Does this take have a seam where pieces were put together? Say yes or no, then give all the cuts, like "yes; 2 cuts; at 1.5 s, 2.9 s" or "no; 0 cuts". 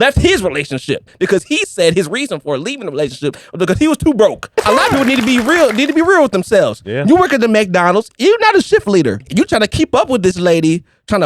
yes; 3 cuts; at 1.1 s, 4.6 s, 9.2 s